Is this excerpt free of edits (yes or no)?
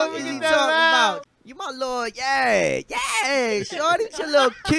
no